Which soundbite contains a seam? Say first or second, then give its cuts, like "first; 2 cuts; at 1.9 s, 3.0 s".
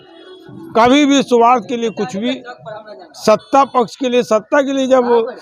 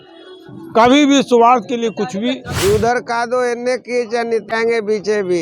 second; 1 cut; at 2.5 s